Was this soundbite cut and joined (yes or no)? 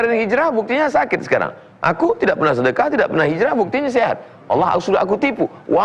no